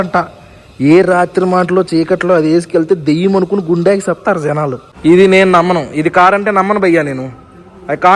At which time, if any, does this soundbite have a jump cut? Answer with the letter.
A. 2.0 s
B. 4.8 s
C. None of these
B